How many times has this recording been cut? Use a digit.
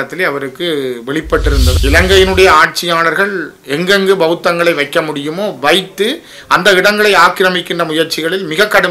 1